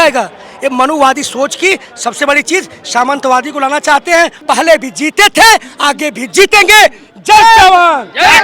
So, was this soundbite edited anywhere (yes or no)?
yes